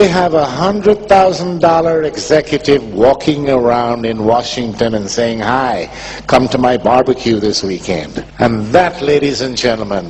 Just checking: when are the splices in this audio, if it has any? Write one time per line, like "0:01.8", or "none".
0:02.1